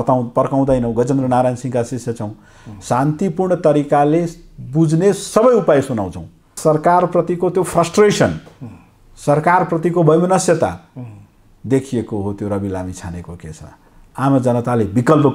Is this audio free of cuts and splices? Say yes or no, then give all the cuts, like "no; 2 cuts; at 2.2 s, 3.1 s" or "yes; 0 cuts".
no; 1 cut; at 6.6 s